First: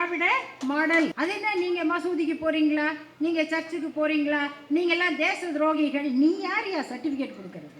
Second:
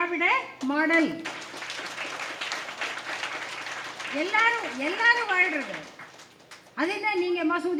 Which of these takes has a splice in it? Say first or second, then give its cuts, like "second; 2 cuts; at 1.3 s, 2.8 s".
first; 1 cut; at 1.1 s